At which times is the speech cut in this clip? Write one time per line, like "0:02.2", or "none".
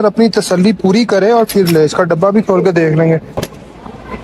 0:03.3